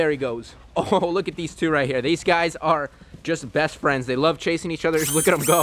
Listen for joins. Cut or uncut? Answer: uncut